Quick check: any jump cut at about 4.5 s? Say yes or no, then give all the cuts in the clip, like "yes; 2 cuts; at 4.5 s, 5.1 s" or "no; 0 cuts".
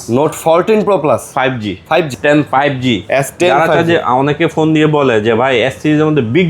no; 1 cut; at 2.1 s